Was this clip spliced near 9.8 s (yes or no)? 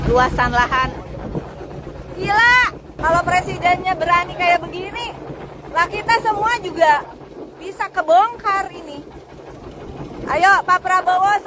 no